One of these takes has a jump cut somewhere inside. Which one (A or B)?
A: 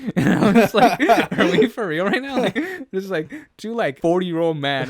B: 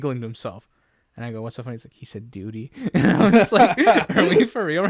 A